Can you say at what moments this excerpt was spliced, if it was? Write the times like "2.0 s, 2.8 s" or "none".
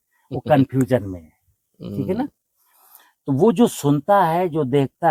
none